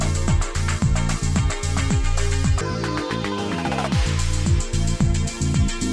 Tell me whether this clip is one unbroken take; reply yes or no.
no